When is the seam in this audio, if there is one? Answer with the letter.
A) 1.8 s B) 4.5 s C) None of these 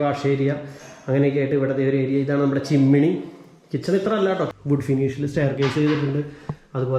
B